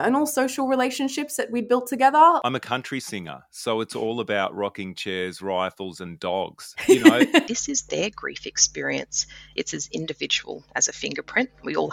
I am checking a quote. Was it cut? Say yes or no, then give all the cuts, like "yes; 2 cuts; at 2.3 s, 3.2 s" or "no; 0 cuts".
yes; 2 cuts; at 2.4 s, 7.4 s